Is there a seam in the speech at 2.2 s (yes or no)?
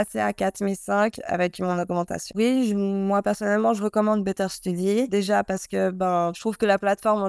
yes